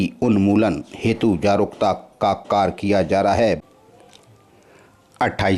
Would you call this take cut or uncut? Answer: cut